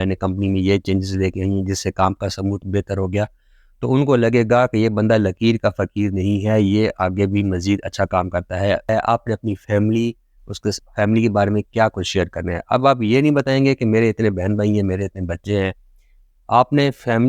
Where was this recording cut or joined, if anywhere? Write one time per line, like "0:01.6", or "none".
0:08.9